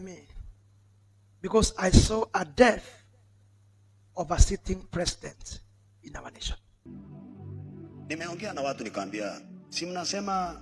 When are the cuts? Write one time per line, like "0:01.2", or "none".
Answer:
0:06.8